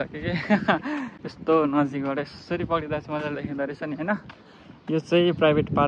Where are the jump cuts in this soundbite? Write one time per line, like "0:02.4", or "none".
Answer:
none